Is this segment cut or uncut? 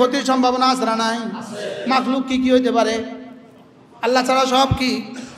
uncut